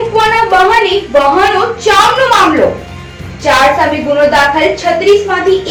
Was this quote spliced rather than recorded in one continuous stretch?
no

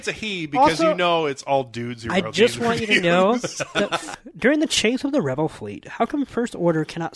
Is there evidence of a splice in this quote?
yes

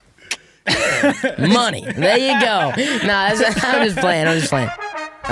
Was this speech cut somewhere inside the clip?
no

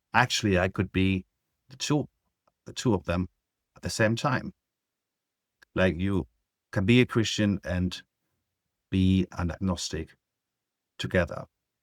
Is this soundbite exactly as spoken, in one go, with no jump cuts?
yes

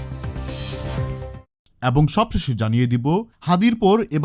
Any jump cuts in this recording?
yes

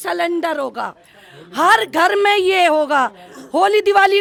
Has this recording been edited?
no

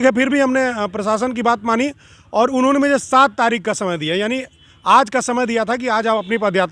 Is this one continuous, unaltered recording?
yes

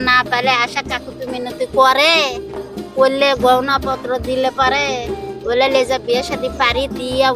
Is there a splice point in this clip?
no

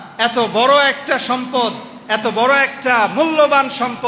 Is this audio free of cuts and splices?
yes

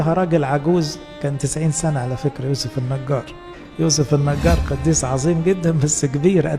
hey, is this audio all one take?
yes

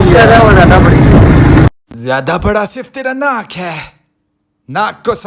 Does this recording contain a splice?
no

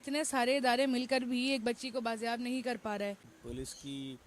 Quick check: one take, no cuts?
no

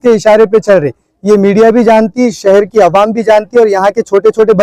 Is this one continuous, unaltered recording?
yes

